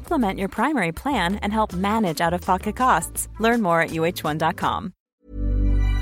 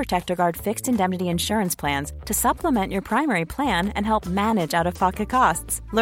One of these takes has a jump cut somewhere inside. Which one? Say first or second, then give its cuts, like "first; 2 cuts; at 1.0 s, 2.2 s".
first; 1 cut; at 5.1 s